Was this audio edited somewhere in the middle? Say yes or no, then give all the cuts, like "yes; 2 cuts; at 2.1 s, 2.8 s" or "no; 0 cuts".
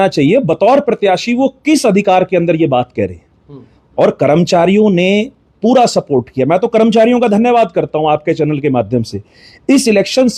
no; 0 cuts